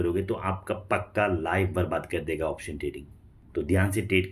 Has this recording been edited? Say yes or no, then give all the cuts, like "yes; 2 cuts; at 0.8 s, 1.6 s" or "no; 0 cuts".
no; 0 cuts